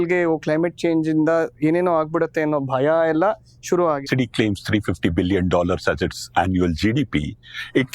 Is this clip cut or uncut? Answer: cut